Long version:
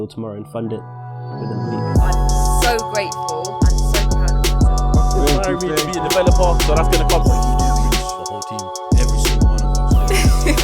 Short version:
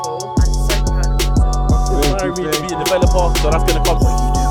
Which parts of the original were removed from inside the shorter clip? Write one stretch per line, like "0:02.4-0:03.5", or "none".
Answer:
none